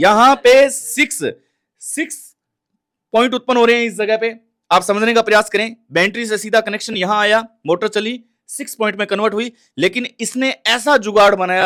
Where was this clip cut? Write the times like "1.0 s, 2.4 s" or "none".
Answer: none

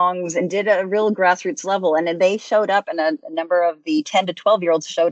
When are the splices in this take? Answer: 4.1 s

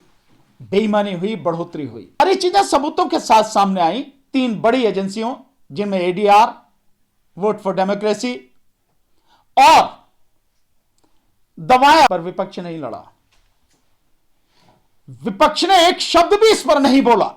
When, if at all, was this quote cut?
2.2 s, 12.1 s

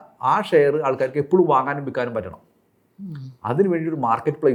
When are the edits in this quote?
none

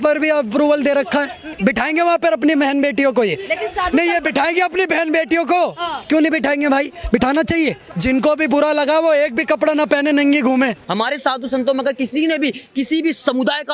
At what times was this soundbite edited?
1.4 s, 7.9 s, 10.8 s

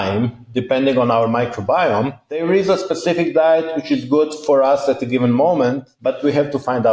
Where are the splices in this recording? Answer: 2.4 s, 5.9 s

